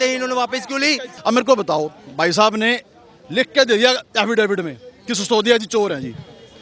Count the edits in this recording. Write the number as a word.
one